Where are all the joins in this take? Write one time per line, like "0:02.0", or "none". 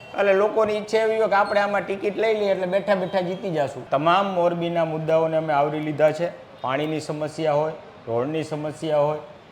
0:03.9